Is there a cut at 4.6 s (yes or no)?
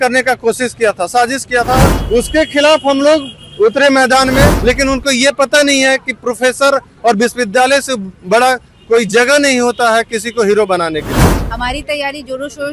yes